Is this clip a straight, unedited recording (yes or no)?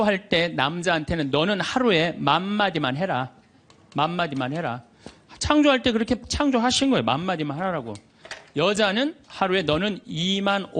yes